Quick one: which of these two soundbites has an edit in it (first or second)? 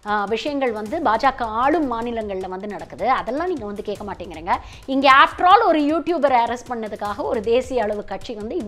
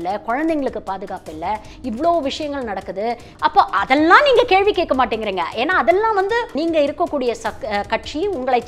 second